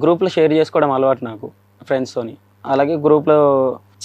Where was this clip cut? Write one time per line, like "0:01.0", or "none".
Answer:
0:02.5

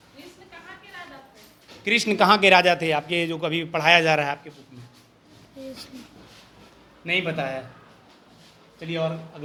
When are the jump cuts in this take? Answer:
none

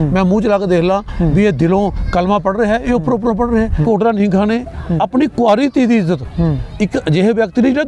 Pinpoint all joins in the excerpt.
0:03.8

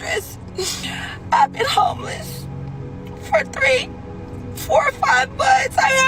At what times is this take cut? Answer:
none

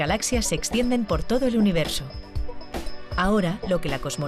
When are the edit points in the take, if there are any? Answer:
none

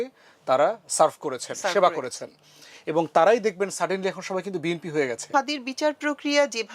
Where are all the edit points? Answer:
0:05.3

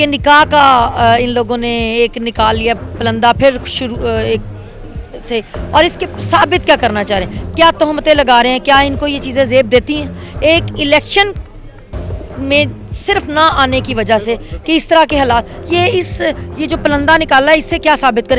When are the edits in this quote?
none

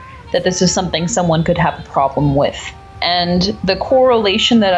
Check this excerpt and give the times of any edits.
0:03.0

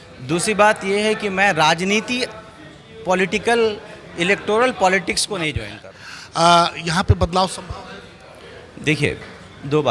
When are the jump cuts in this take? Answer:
0:05.7

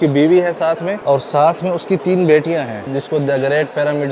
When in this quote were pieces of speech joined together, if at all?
0:00.9
0:02.8

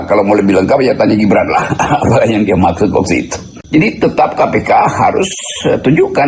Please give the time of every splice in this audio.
0:03.5

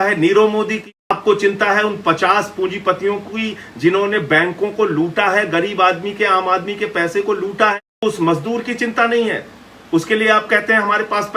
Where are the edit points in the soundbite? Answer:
0:01.1
0:08.0

